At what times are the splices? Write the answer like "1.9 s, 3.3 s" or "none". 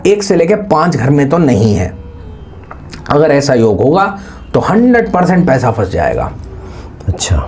none